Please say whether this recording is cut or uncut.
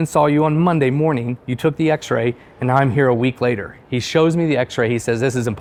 uncut